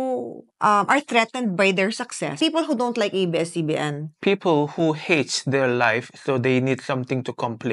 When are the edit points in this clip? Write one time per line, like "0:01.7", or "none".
0:02.4
0:04.0